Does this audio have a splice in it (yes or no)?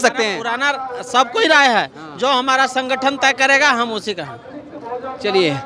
no